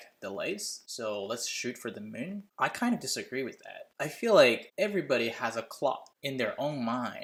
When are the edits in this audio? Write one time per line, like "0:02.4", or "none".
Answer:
none